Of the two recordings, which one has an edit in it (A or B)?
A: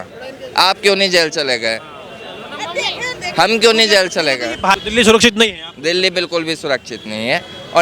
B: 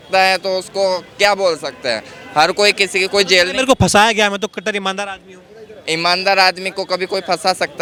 A